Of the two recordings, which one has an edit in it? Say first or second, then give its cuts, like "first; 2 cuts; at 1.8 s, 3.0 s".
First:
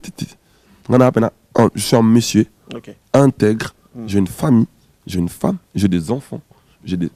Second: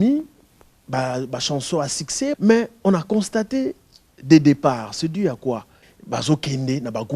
second; 2 cuts; at 2.4 s, 5.9 s